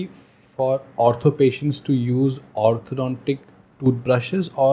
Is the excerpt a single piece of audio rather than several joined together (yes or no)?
yes